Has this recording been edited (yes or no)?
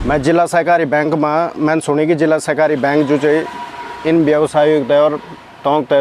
no